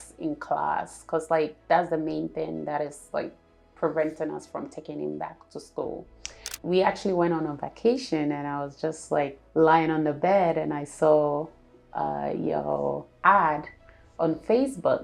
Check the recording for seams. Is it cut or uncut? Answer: cut